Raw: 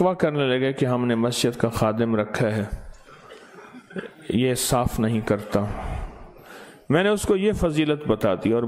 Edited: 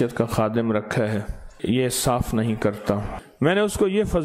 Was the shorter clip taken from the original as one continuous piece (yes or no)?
no